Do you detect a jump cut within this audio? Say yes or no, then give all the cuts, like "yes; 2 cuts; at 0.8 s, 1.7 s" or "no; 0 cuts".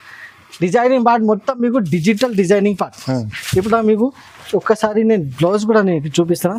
no; 0 cuts